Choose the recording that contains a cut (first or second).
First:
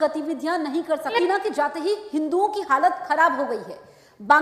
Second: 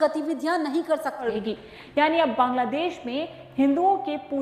second